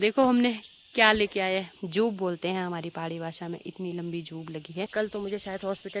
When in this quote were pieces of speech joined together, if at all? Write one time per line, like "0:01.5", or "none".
0:01.7
0:04.6